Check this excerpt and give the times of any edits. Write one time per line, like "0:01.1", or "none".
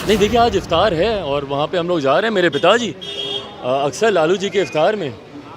none